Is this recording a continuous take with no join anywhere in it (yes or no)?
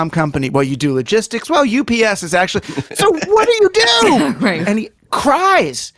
no